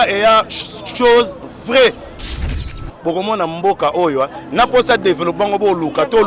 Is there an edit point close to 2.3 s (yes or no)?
yes